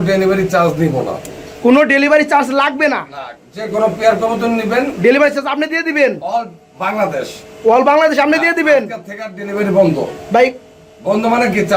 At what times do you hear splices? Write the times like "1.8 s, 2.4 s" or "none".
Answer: none